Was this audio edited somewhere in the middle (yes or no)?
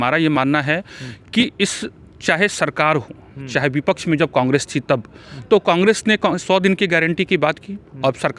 no